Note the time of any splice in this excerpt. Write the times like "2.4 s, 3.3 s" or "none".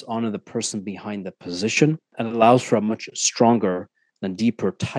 2.1 s